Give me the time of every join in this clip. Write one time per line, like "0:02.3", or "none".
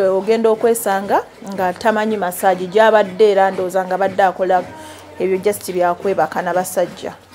none